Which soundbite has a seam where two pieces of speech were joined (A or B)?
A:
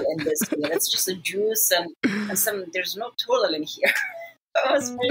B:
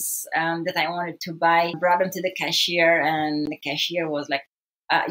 B